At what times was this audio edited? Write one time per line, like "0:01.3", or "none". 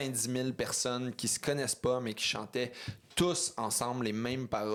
none

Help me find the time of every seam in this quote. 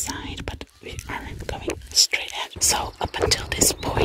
0:02.6

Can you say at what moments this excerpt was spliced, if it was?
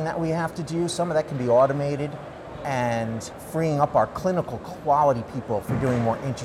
0:03.3

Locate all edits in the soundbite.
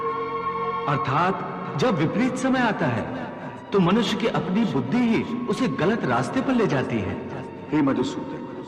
none

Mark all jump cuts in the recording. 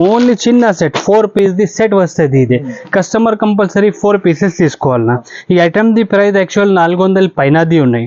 none

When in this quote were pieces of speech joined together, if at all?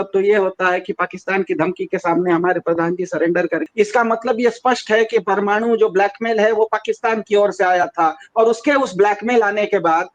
0:03.6

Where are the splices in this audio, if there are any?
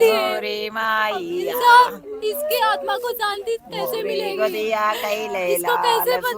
none

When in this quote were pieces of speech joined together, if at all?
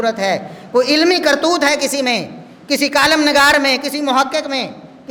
none

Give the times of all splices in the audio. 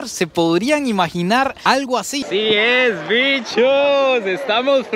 0:02.2

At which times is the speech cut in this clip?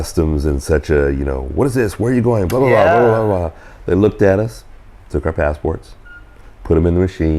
none

